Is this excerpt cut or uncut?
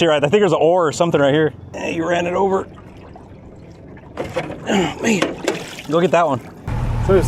uncut